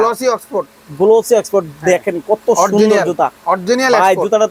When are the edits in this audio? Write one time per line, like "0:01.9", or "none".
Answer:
none